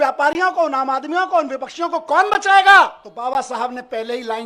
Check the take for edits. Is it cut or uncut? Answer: cut